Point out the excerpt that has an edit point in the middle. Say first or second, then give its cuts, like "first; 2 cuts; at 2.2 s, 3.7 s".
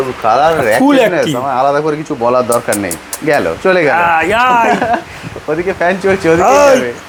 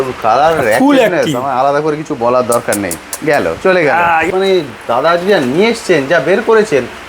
second; 1 cut; at 4.3 s